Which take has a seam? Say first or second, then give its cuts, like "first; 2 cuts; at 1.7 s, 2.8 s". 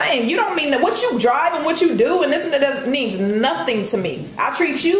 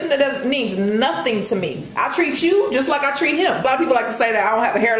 second; 1 cut; at 3.7 s